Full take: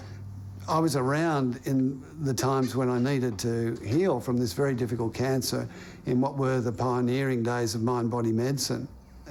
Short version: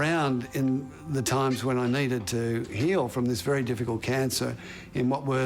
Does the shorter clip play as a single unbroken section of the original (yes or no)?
yes